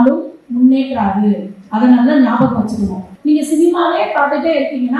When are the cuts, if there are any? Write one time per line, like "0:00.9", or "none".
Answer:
0:03.1